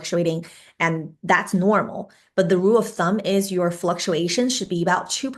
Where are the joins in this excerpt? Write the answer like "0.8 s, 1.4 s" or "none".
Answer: none